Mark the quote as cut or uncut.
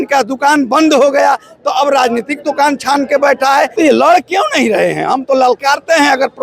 cut